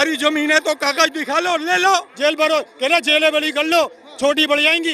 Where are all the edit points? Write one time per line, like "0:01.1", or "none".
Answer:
0:02.1